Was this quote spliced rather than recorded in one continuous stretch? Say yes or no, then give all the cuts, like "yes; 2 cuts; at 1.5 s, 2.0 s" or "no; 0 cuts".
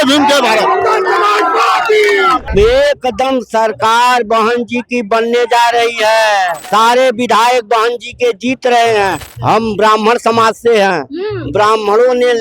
yes; 3 cuts; at 2.5 s, 6.6 s, 9.3 s